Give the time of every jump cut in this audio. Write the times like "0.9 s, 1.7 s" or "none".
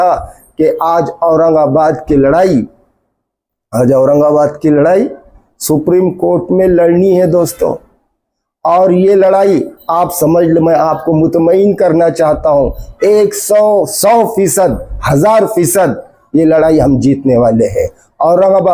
none